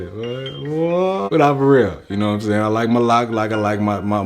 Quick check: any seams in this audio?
yes; 1 cut; at 1.3 s

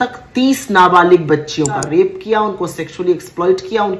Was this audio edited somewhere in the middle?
yes; 1 cut; at 1.8 s

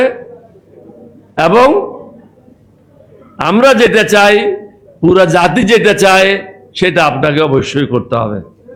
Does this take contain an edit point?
no; 0 cuts

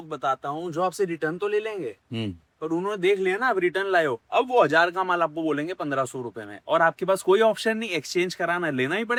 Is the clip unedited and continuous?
yes; 0 cuts

